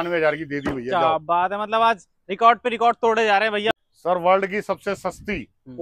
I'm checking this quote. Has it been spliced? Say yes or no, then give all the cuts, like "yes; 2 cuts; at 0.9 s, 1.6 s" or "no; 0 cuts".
yes; 1 cut; at 3.8 s